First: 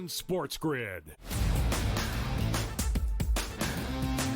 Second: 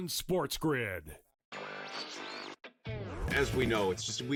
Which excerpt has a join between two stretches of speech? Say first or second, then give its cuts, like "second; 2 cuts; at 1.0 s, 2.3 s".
first; 1 cut; at 1.1 s